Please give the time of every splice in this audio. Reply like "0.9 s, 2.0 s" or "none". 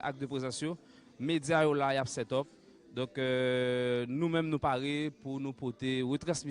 0.9 s